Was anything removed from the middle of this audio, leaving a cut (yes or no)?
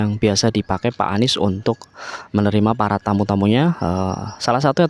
no